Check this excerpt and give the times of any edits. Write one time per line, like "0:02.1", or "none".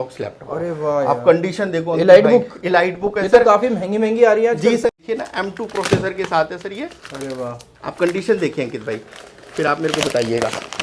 0:04.9